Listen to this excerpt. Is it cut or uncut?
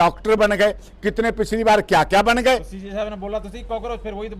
uncut